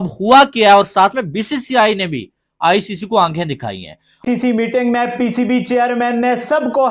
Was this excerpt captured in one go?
no; 1 cut; at 4.2 s

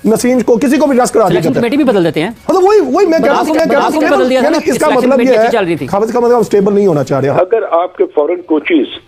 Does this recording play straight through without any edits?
no; 1 cut; at 7.4 s

